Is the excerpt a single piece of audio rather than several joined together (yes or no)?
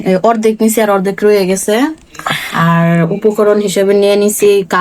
yes